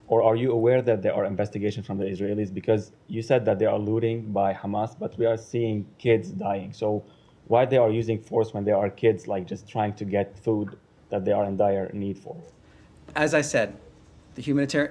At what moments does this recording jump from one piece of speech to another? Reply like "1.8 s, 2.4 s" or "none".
none